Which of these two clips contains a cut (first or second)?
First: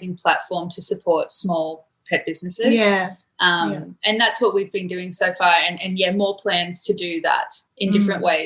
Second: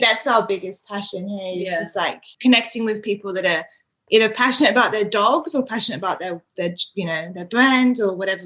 second